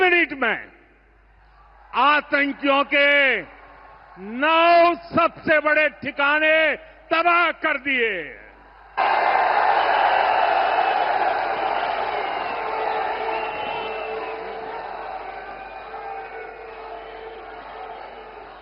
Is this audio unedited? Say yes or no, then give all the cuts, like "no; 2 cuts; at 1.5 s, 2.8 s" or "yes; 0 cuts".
yes; 0 cuts